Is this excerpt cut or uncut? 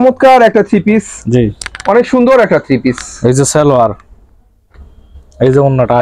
uncut